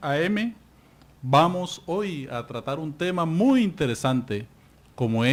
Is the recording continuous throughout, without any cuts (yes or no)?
yes